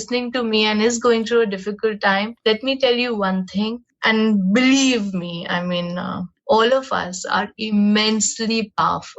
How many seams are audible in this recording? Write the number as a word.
two